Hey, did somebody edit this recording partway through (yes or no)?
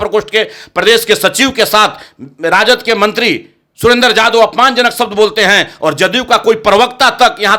no